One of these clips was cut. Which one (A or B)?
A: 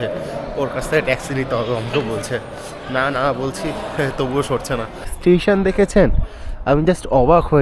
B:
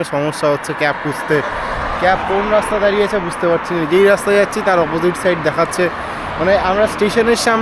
A